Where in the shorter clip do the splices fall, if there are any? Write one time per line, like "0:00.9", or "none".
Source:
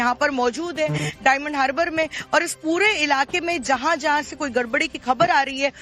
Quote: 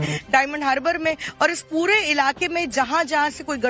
none